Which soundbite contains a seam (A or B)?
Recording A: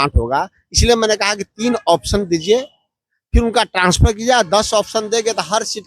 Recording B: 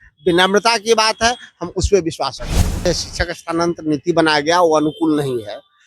B